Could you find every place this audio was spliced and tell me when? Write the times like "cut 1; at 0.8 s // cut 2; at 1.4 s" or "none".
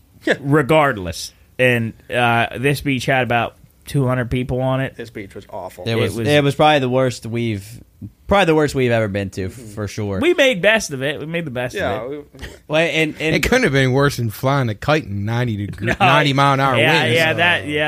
cut 1; at 1.0 s